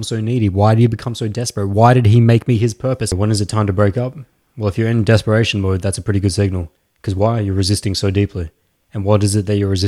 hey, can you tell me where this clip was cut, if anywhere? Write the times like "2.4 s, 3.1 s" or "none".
3.1 s

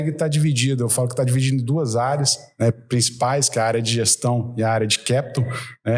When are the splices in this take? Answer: none

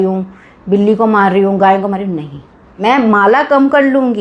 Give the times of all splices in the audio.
2.8 s

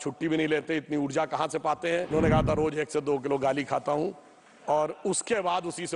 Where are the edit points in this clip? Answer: 2.1 s

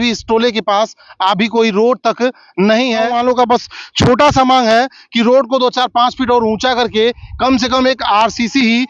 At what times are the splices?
3.1 s

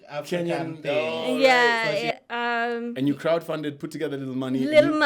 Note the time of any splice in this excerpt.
2.1 s

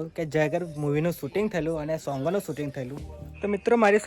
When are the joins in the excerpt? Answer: none

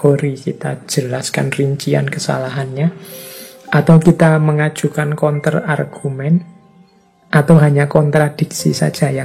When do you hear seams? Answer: none

